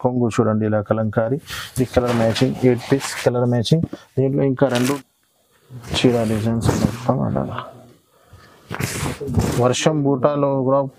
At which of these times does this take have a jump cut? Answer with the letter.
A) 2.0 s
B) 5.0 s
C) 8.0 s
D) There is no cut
B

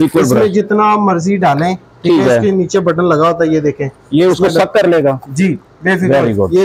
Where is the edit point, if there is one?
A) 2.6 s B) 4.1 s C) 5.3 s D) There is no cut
D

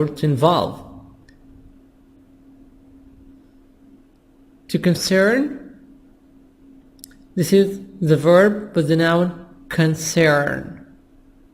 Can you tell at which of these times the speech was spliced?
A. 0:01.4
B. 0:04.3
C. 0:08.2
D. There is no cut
C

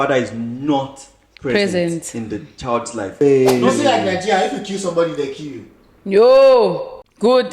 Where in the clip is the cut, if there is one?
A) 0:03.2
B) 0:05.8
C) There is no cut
A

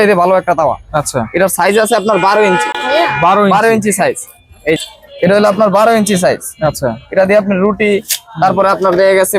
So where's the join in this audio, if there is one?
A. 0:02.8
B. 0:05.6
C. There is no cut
C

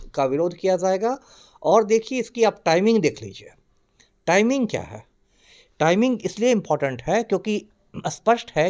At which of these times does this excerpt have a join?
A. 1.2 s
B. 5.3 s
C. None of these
C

